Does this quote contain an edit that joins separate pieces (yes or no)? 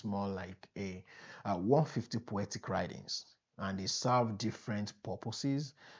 no